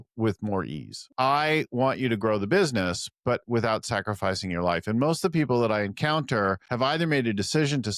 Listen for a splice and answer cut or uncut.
cut